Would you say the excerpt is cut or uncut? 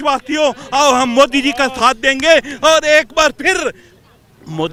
uncut